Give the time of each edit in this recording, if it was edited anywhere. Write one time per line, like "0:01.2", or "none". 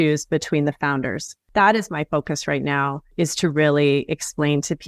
0:01.3